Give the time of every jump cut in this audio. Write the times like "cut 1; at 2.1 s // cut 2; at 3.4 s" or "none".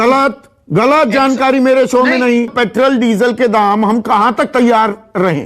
cut 1; at 2.5 s